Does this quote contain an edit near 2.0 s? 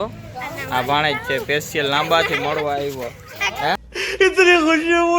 no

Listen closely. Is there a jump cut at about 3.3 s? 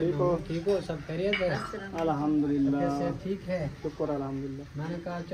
no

